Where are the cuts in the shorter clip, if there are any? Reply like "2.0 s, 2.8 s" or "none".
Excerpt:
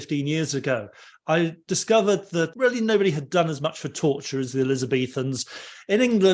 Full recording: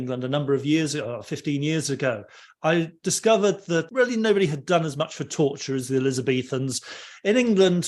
none